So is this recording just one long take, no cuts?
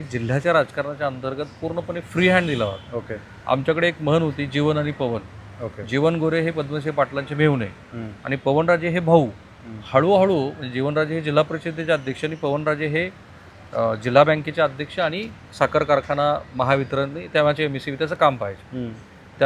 yes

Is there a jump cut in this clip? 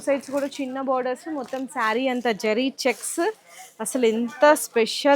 no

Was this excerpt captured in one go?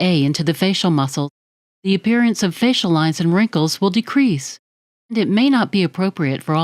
no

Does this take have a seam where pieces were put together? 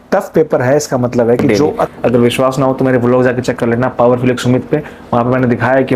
yes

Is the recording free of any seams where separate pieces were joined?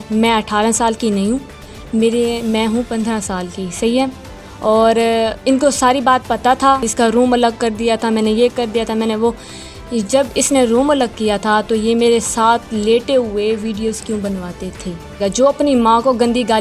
no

